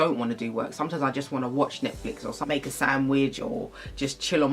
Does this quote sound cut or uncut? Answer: uncut